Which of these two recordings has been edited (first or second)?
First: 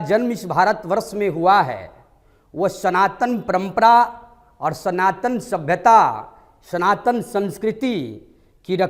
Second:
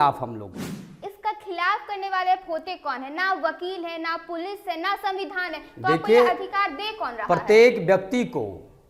second